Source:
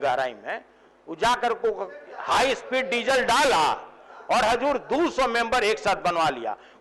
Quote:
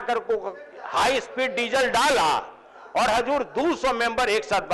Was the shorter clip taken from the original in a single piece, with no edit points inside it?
yes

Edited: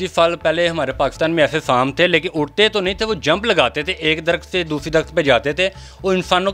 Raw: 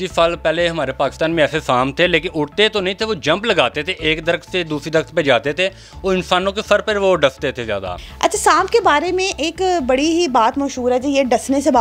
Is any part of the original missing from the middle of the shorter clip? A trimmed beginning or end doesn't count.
no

